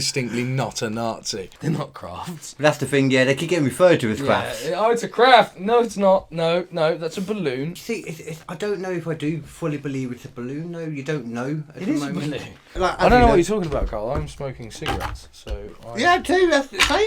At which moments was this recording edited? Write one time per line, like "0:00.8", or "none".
0:01.5
0:07.7
0:12.7